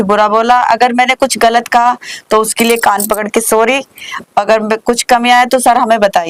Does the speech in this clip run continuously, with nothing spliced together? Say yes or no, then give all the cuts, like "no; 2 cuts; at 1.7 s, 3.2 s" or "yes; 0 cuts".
yes; 0 cuts